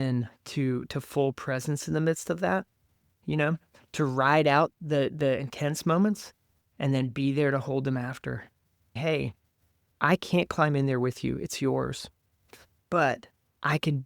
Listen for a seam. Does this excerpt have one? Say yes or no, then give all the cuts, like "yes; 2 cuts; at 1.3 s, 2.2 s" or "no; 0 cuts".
yes; 1 cut; at 9.0 s